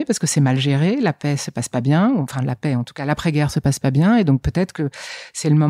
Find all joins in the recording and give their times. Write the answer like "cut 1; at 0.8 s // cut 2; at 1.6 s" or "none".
none